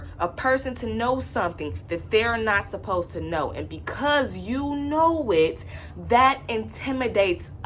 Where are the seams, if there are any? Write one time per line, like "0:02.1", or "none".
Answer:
none